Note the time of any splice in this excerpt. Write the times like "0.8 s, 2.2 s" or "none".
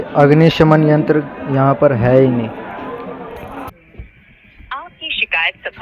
3.7 s